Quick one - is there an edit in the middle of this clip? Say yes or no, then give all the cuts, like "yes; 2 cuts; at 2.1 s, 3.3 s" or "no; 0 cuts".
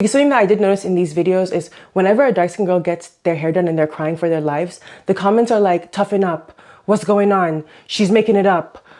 no; 0 cuts